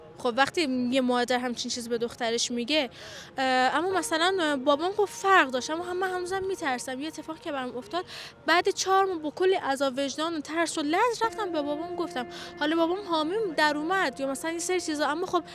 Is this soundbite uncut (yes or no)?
yes